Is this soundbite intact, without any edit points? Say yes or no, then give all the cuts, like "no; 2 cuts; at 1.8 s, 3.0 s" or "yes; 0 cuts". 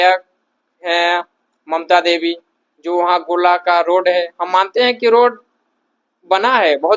yes; 0 cuts